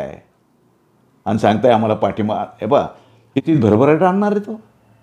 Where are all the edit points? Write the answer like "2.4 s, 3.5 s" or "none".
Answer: 3.4 s